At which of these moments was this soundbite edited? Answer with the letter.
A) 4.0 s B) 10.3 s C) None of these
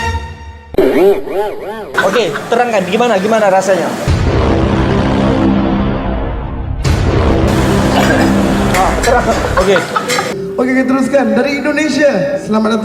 B